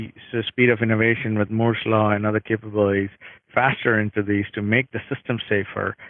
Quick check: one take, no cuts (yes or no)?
no